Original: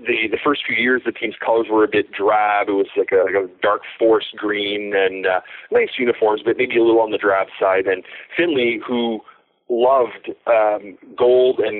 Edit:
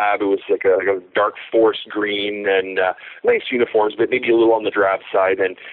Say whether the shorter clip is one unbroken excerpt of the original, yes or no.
yes